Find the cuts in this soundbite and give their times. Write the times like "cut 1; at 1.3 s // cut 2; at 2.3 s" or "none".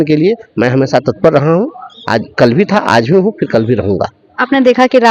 none